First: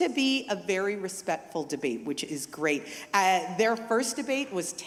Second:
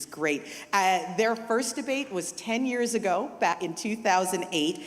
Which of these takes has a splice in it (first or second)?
second